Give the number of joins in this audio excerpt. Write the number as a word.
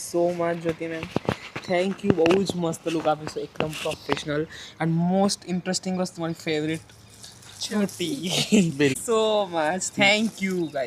zero